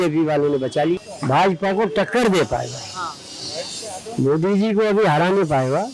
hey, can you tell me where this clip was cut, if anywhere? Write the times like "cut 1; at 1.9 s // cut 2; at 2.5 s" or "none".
cut 1; at 1.1 s